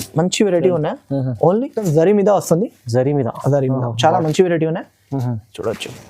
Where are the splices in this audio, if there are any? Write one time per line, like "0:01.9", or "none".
0:01.8